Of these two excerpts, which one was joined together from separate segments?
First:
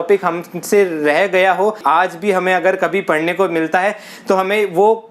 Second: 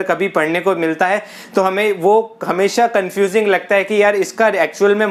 first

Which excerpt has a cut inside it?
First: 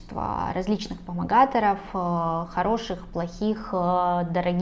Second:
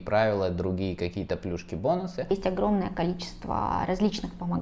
second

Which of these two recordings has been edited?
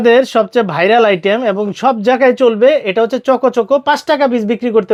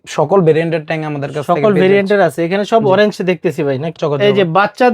second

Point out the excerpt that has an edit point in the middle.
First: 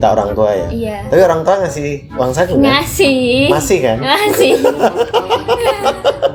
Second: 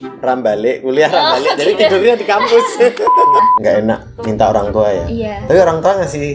second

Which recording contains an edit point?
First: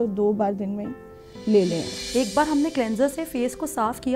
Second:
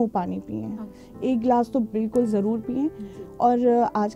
first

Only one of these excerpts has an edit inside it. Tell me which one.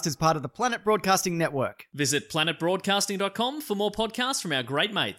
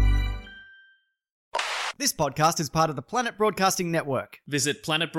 second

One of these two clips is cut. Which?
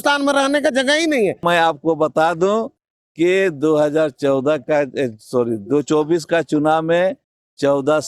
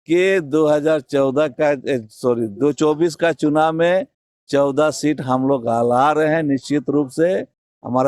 first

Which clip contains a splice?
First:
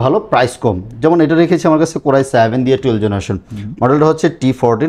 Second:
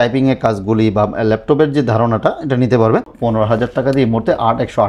second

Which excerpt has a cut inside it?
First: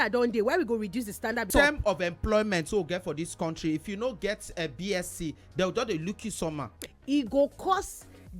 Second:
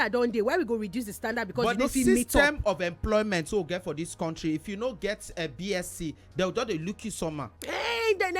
first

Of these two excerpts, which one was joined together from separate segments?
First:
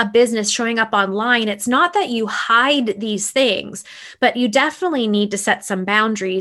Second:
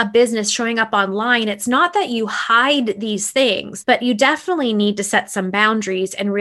second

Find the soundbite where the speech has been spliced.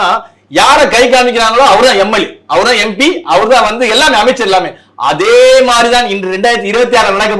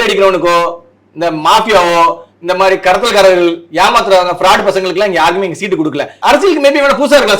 second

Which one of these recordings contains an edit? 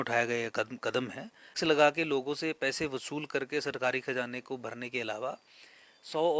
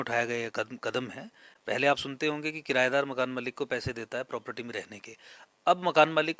first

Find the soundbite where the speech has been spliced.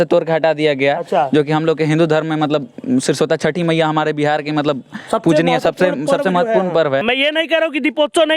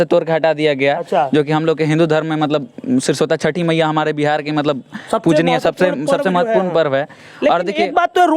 first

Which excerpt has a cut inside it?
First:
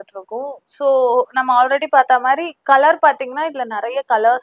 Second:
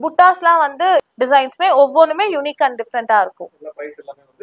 second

